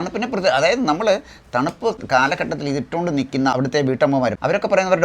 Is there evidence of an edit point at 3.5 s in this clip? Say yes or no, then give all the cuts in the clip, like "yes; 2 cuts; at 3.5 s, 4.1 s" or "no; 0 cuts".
yes; 2 cuts; at 2.0 s, 3.5 s